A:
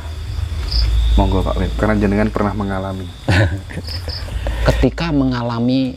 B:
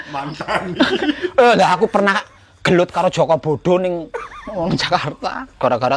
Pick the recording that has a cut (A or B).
A